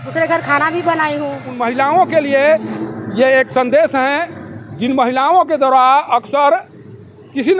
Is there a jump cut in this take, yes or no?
yes